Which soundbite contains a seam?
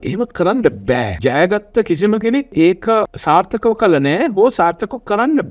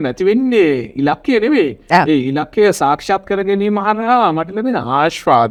first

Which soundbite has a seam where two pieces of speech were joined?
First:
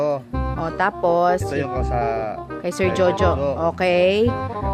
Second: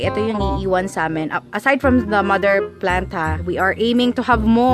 second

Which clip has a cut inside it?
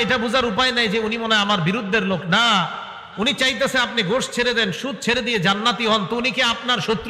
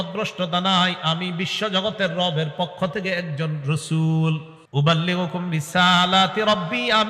second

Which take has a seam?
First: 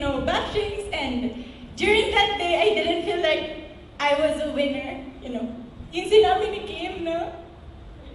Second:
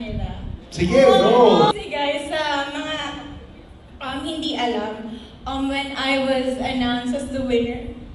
second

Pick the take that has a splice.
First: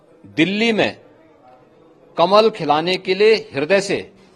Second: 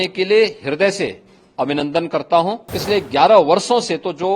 second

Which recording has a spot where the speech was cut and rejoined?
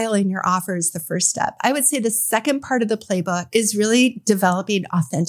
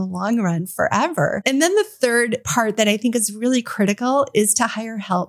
second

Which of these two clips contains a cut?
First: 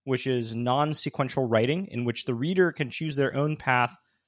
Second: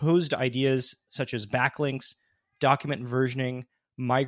second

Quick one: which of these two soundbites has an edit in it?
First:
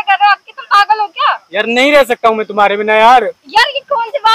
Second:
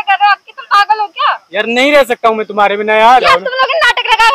second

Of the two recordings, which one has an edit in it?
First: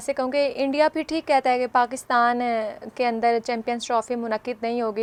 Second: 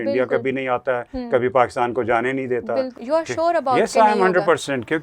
second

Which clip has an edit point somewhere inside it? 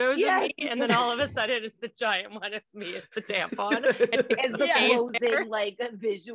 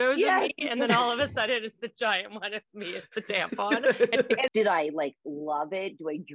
second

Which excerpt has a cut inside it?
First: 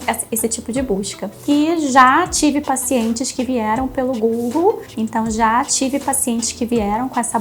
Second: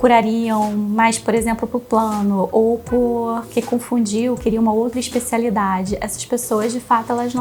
first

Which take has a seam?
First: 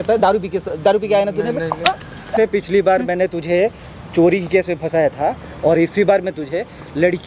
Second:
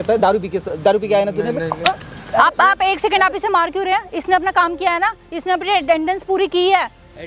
first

